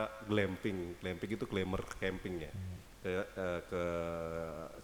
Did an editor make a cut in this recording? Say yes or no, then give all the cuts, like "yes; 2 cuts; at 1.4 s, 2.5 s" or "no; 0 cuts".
no; 0 cuts